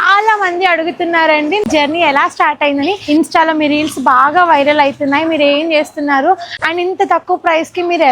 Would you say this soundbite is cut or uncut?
cut